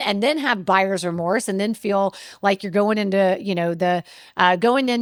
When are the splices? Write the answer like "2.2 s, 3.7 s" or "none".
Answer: none